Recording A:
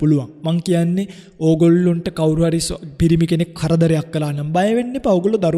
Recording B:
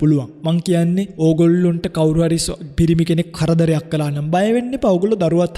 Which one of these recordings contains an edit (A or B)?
B